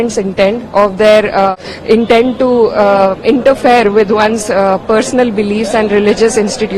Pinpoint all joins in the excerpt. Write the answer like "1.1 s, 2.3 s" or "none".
1.5 s